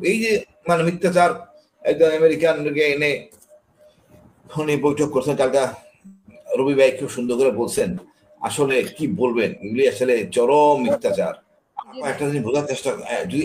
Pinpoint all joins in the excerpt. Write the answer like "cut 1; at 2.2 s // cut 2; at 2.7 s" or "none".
cut 1; at 12.0 s